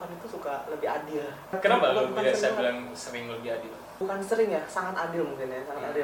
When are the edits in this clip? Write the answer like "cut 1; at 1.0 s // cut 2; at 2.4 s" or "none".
none